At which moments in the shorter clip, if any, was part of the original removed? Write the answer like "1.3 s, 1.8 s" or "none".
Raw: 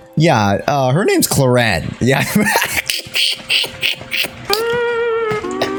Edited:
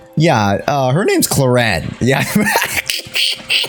none